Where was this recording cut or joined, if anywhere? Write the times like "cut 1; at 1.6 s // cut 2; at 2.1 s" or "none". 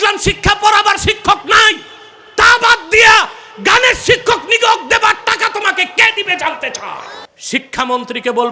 cut 1; at 7.1 s